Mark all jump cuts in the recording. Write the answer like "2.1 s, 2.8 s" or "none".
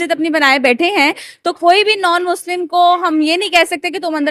none

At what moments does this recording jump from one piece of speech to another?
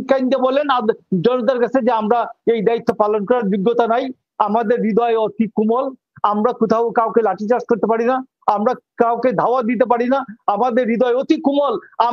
none

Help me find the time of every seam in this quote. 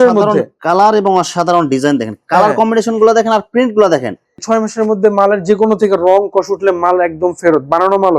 4.4 s

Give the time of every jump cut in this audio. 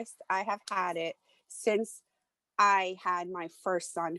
none

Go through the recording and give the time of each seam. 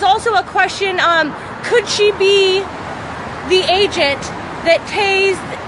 none

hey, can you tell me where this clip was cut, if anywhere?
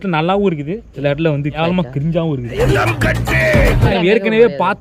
2.7 s, 3.9 s

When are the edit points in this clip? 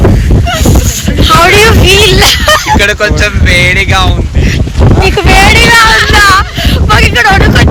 none

